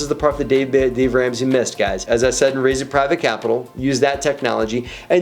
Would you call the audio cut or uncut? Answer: cut